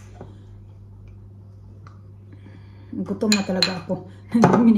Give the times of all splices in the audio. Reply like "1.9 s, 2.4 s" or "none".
none